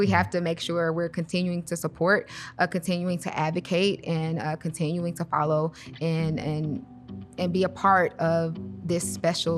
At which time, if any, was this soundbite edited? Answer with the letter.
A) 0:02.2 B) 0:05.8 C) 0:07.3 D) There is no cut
D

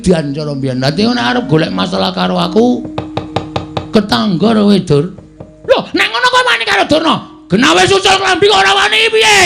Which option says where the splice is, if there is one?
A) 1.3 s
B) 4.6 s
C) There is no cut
C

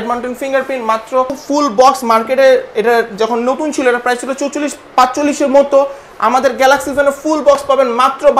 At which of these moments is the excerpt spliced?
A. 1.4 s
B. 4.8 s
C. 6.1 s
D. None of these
A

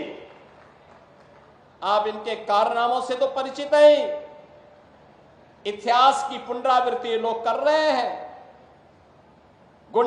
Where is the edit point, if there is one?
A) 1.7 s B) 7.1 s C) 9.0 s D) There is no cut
D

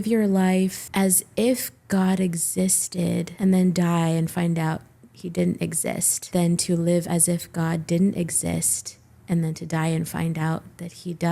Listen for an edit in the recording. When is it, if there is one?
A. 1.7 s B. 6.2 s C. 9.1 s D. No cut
B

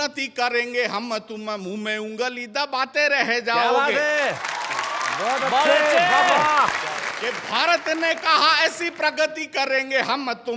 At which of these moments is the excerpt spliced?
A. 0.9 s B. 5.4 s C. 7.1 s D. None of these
C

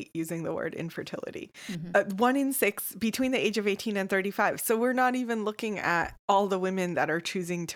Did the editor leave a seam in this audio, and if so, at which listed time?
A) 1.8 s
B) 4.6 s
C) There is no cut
A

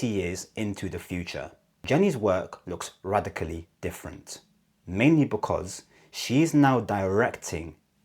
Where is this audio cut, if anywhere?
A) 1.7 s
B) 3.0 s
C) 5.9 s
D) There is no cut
A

